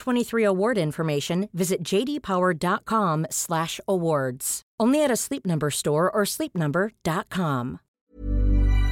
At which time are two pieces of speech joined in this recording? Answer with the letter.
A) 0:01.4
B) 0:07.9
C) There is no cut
B